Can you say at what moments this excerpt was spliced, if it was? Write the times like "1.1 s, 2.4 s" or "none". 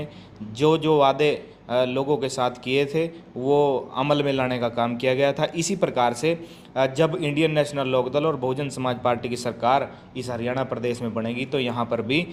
none